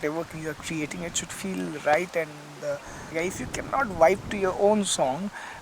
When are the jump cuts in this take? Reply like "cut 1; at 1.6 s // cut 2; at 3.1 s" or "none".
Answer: cut 1; at 3.1 s